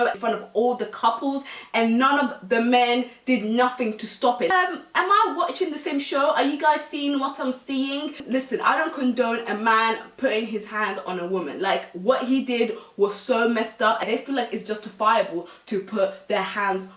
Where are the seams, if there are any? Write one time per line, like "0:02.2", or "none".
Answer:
0:04.5
0:14.1

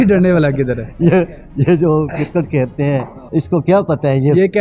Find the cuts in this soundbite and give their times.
0:03.2

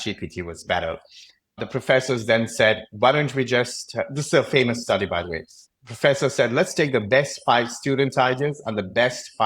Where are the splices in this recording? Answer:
0:01.6

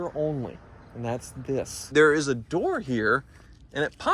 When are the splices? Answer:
0:01.9

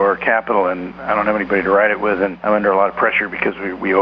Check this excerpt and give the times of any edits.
0:00.9
0:02.4

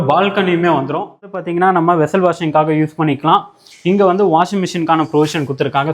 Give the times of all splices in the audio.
0:01.4

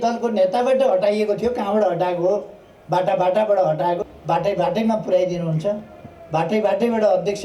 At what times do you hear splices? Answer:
0:04.1

